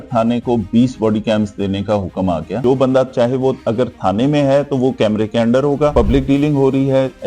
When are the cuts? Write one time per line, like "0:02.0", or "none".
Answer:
0:02.5
0:05.9